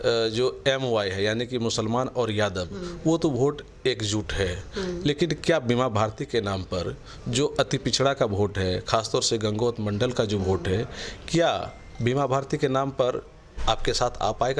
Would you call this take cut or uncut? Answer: uncut